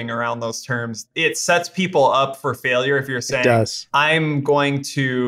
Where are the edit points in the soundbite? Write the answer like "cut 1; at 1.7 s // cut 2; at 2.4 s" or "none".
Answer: cut 1; at 1.0 s